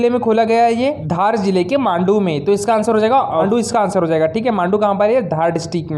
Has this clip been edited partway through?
yes; 2 cuts; at 1.0 s, 3.5 s

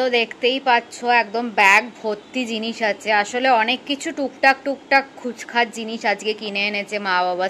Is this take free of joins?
yes; 0 cuts

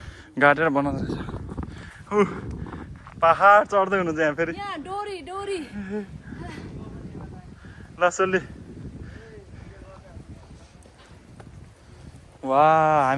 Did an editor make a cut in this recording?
no; 0 cuts

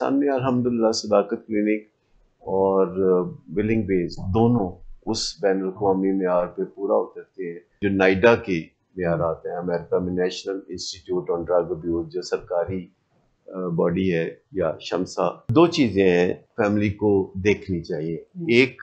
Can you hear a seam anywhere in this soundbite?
yes; 3 cuts; at 7.8 s, 15.5 s, 16.4 s

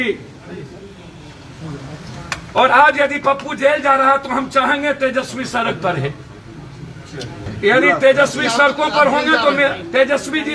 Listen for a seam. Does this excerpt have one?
yes; 1 cut; at 7.5 s

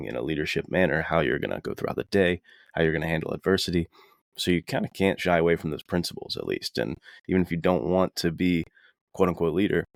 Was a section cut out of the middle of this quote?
no; 0 cuts

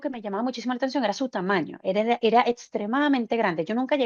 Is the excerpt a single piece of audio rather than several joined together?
yes; 0 cuts

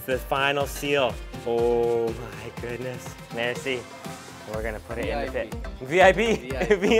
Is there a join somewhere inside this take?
yes; 1 cut; at 3.3 s

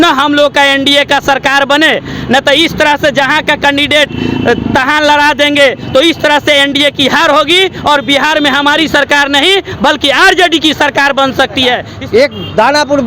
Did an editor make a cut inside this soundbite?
yes; 1 cut; at 11.9 s

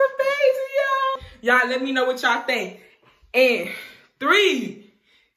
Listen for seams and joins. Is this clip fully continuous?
no; 1 cut; at 1.2 s

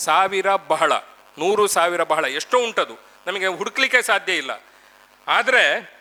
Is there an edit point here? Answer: no; 0 cuts

